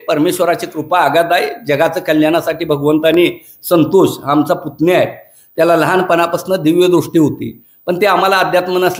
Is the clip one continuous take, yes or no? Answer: yes